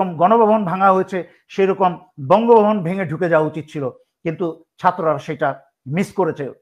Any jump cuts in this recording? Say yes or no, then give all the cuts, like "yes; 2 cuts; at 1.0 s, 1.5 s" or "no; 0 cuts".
no; 0 cuts